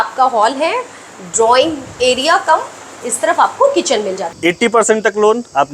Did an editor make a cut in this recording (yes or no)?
yes